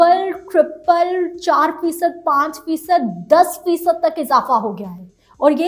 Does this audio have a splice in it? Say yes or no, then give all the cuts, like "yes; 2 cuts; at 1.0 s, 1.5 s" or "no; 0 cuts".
no; 0 cuts